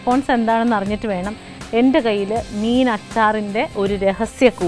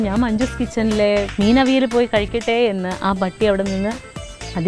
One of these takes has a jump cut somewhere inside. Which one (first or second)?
second